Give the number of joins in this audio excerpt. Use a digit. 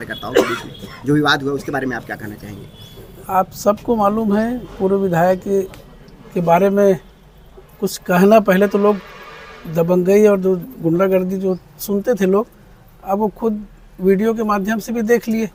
0